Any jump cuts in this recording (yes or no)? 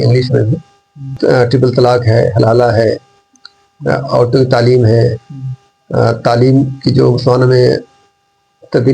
yes